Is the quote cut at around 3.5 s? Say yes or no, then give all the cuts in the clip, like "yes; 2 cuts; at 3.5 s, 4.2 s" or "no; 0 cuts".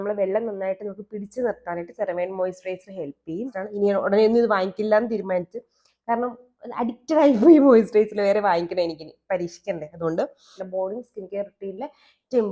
yes; 2 cuts; at 3.5 s, 10.6 s